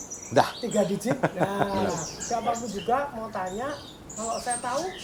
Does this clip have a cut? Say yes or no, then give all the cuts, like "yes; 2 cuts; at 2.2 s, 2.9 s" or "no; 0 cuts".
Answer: yes; 1 cut; at 1.8 s